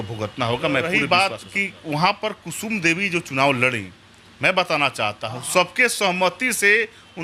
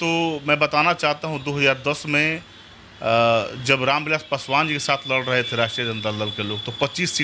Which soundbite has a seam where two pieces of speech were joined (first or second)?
first